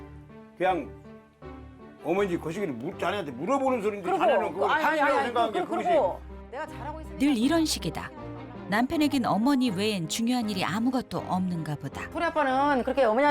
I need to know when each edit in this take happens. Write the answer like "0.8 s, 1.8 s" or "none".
12.0 s